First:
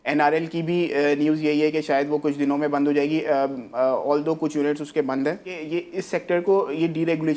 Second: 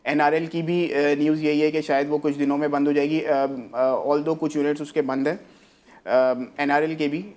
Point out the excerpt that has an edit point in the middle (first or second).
first